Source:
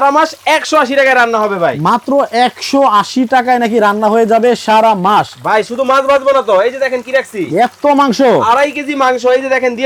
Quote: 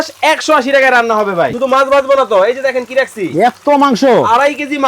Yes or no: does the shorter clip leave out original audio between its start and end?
yes